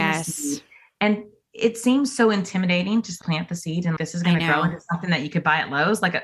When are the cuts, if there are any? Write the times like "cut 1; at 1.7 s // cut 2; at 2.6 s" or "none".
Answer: cut 1; at 3.1 s